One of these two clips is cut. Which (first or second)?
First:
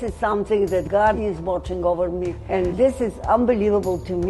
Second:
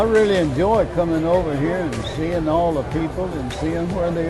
first